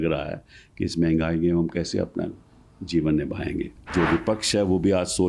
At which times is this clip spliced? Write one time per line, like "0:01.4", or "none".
0:03.8